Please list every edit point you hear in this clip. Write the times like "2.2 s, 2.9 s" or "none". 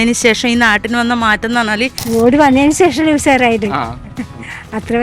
2.0 s